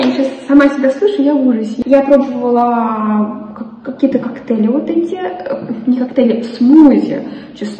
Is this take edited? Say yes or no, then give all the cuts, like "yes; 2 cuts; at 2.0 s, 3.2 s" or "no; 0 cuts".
yes; 1 cut; at 1.7 s